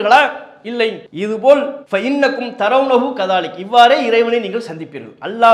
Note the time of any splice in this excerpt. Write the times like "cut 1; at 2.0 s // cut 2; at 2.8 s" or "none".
cut 1; at 1.1 s // cut 2; at 1.8 s